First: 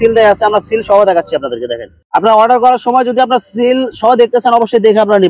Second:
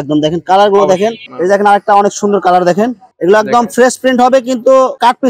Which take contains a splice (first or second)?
second